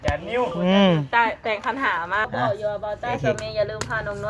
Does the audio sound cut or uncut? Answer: cut